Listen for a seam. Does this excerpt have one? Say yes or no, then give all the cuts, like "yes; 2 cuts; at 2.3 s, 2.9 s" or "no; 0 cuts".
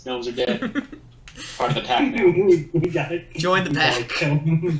no; 0 cuts